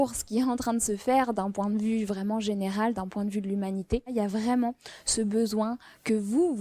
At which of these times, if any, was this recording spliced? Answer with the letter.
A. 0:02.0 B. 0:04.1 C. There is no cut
B